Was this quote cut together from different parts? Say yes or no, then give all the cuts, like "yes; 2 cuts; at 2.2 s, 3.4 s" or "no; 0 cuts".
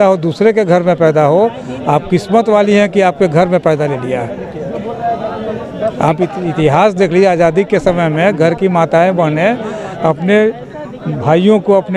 no; 0 cuts